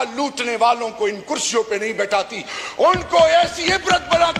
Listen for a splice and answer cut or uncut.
uncut